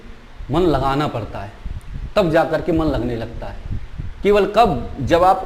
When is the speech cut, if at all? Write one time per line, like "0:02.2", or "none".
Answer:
none